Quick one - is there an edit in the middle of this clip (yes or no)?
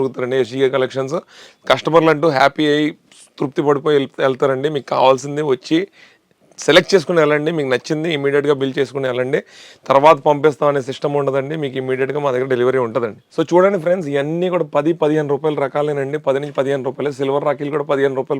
no